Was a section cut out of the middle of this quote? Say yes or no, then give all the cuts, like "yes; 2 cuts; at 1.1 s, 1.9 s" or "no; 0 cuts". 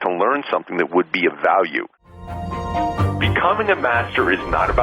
yes; 1 cut; at 2.4 s